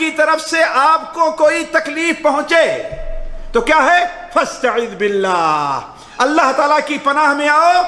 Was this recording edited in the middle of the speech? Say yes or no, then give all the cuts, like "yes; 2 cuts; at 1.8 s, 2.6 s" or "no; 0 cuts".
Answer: no; 0 cuts